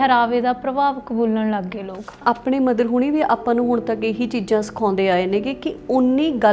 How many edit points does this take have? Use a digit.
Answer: 1